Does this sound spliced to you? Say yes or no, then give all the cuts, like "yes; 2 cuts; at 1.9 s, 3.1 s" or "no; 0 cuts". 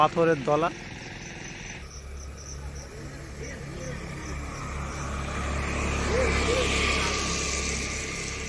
yes; 1 cut; at 2.0 s